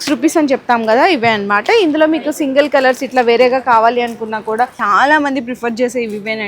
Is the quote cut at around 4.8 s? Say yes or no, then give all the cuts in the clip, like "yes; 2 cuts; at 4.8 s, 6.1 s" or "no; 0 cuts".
yes; 1 cut; at 4.8 s